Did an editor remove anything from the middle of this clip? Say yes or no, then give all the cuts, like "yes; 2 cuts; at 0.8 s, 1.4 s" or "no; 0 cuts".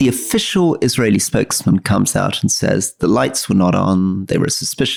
no; 0 cuts